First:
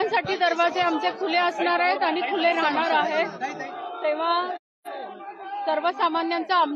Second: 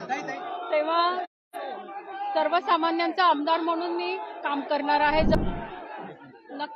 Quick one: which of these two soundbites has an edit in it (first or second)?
second